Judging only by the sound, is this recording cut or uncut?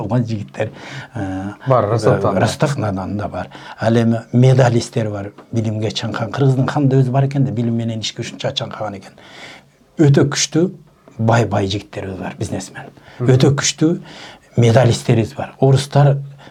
uncut